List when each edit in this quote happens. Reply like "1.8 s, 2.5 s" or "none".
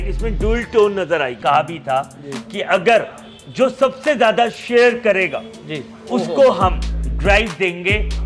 1.4 s